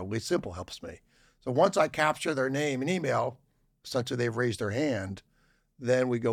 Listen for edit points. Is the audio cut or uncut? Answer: uncut